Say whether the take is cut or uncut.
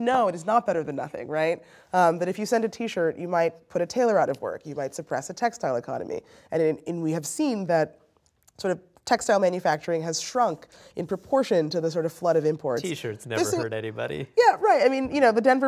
uncut